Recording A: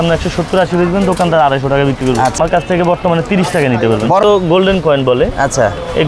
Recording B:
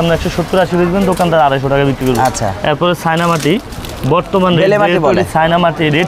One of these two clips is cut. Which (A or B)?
A